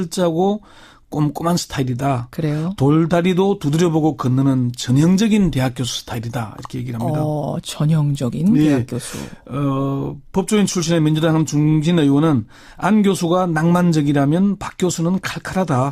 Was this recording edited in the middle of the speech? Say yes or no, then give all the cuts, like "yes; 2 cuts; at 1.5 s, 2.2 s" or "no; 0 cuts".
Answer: no; 0 cuts